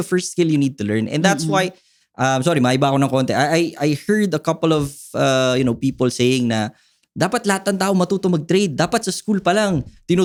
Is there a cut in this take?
no; 0 cuts

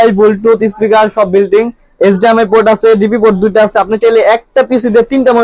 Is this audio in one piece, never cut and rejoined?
yes; 0 cuts

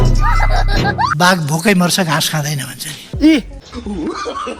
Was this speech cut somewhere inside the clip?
yes; 2 cuts; at 1.1 s, 3.6 s

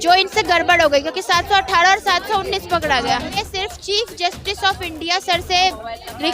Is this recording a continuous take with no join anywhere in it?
no; 1 cut; at 3.4 s

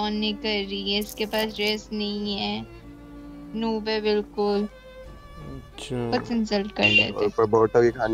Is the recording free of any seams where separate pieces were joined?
no; 1 cut; at 7.2 s

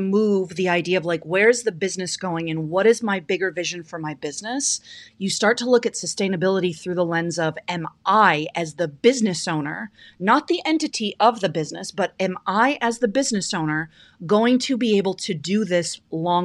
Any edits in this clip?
no; 0 cuts

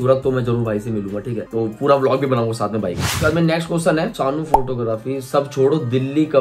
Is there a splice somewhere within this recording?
no; 0 cuts

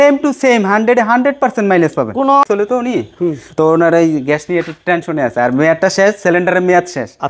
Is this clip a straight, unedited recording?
no; 1 cut; at 2.5 s

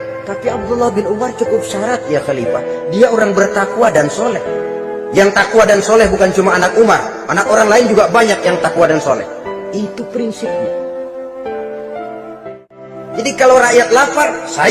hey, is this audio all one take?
no; 1 cut; at 13.0 s

